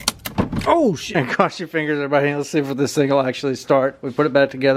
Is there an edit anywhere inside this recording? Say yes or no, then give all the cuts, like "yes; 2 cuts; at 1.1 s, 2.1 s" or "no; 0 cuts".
yes; 1 cut; at 1.2 s